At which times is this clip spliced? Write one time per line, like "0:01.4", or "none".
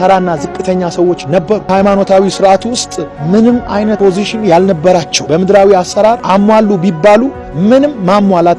0:01.7
0:04.0
0:05.2
0:06.2